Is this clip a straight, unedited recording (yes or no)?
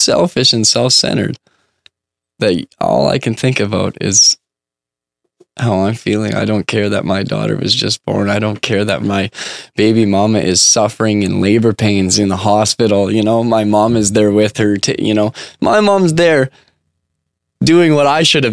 no